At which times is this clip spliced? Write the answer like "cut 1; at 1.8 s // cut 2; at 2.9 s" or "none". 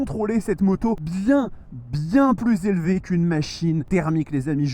cut 1; at 1.1 s // cut 2; at 3.8 s